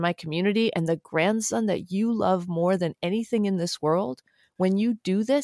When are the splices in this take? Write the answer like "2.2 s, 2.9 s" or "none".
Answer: none